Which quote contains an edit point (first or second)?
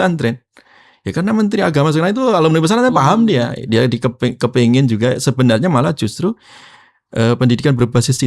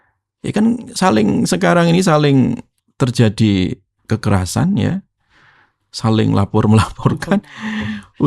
second